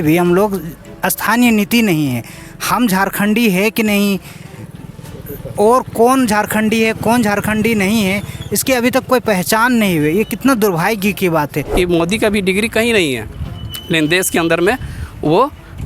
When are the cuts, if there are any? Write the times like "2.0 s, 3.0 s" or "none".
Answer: 11.7 s